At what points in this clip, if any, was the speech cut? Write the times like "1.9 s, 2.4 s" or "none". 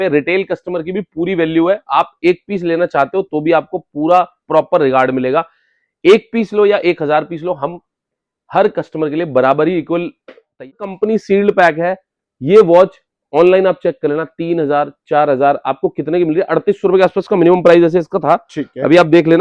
10.7 s